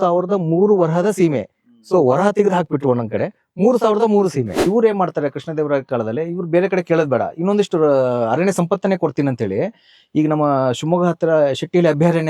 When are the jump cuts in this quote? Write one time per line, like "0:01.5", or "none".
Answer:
0:04.7